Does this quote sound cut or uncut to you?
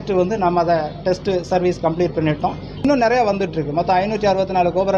cut